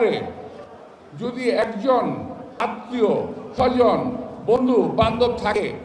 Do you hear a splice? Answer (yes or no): no